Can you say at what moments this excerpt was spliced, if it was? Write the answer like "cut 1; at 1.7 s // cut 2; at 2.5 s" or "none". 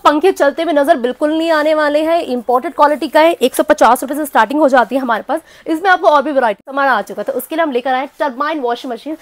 cut 1; at 6.7 s